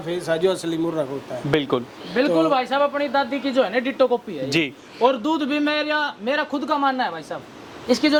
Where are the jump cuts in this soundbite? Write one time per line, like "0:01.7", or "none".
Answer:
none